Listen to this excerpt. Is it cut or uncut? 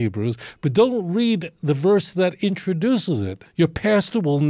cut